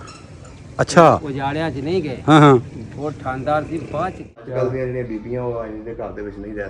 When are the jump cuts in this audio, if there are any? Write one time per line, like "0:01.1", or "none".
0:04.5